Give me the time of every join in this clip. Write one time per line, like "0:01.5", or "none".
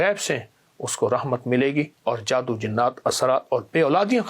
0:01.9